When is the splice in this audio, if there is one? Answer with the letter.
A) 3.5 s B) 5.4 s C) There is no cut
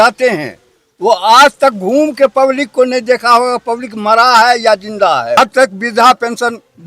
B